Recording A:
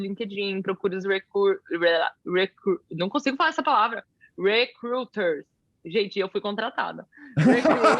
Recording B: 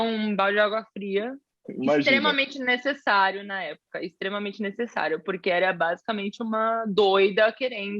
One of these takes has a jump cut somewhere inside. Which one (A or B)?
B